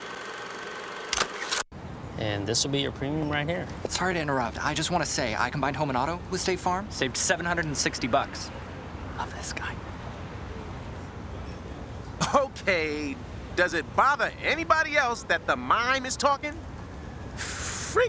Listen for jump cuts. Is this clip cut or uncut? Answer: uncut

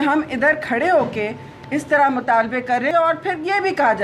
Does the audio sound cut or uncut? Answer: cut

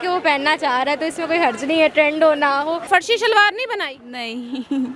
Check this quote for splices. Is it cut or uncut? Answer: cut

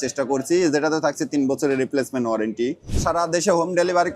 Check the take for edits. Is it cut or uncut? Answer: cut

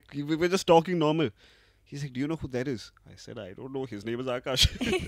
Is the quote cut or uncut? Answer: uncut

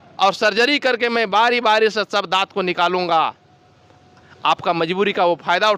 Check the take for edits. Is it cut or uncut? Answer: uncut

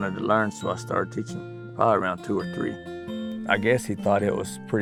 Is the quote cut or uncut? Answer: uncut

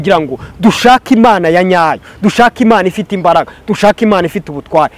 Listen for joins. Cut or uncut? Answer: uncut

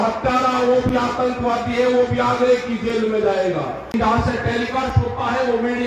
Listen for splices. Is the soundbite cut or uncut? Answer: cut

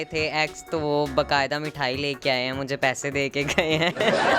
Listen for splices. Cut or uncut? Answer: uncut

